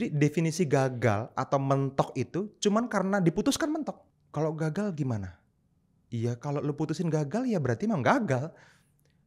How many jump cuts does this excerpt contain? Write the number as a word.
one